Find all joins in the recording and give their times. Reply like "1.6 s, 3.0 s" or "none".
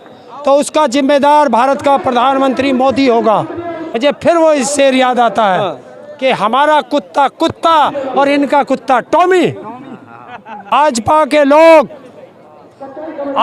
3.8 s, 10.7 s